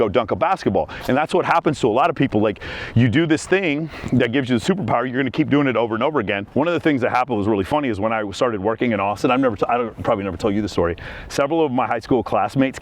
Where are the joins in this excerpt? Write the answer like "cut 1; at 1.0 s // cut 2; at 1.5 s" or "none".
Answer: cut 1; at 6.4 s